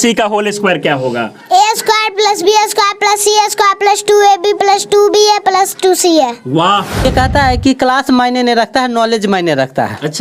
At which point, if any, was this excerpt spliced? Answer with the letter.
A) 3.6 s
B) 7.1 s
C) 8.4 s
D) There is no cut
B